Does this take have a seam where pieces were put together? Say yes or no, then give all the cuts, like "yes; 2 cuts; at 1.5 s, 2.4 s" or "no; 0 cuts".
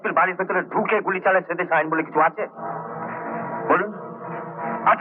no; 0 cuts